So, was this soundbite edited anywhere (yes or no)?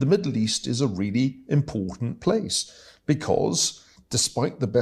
no